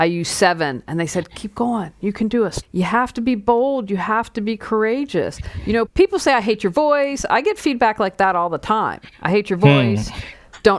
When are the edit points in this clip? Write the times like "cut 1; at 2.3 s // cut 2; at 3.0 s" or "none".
cut 1; at 2.6 s // cut 2; at 5.9 s